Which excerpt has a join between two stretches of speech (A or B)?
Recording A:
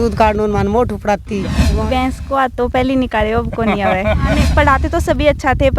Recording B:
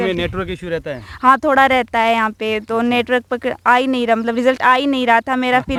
A